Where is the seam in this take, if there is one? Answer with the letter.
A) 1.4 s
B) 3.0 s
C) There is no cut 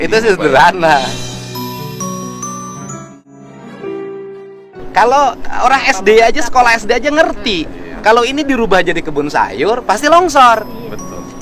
B